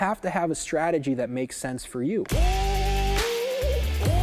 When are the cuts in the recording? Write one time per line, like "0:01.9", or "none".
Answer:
0:02.3